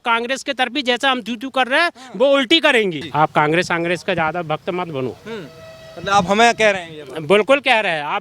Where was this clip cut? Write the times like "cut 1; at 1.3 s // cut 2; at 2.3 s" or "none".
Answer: cut 1; at 3.0 s